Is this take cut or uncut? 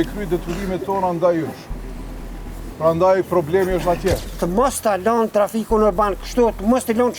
cut